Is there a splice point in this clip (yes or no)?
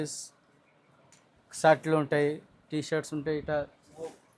no